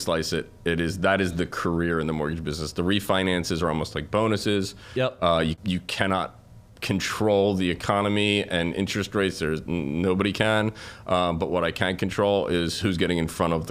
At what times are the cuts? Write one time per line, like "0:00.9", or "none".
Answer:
0:05.6